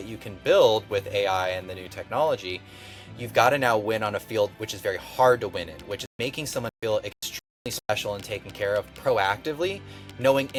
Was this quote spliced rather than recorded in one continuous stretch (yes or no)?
no